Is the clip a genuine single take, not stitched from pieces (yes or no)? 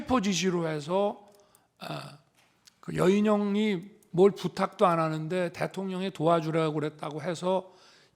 yes